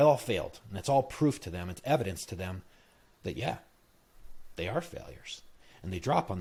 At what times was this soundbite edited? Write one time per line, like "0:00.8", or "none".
none